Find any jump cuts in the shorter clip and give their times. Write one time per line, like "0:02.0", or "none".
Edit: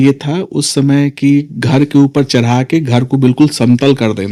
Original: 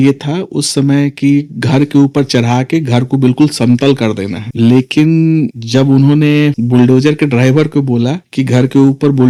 none